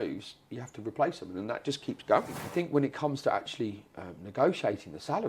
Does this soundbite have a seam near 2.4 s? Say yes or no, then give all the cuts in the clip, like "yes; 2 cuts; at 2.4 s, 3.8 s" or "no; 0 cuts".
yes; 1 cut; at 2.4 s